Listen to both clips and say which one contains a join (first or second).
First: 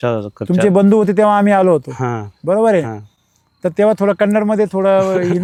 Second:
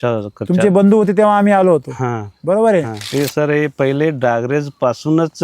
second